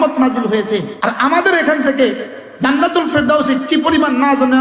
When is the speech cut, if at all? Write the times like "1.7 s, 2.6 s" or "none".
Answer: 0.9 s